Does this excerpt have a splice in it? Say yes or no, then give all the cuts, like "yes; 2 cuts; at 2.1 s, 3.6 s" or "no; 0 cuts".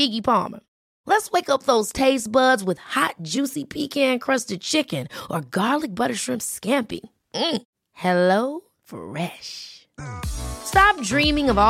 no; 0 cuts